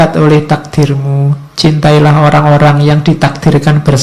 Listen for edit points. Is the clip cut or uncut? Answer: uncut